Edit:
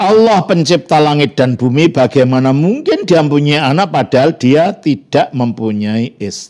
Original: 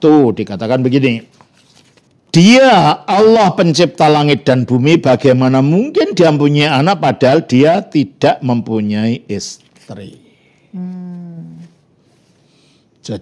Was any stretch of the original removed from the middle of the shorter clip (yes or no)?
no